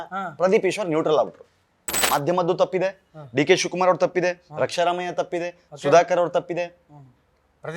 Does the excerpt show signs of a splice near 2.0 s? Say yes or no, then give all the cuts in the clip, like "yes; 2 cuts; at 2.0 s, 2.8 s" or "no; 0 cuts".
yes; 1 cut; at 2.0 s